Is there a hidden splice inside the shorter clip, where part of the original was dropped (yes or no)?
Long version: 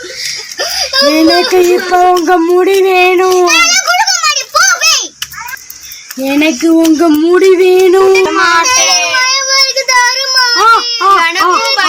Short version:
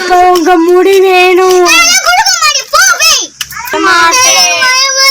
yes